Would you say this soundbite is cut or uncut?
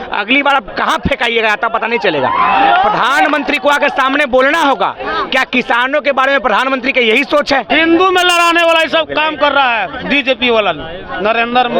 cut